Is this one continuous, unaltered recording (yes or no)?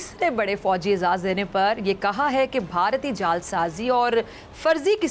yes